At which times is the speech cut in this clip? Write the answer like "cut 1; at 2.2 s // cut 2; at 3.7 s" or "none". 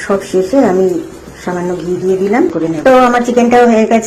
cut 1; at 2.6 s